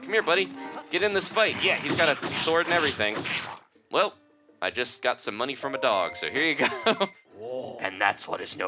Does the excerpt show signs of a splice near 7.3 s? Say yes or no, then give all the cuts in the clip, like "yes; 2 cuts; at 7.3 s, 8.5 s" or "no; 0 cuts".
yes; 2 cuts; at 3.6 s, 7.3 s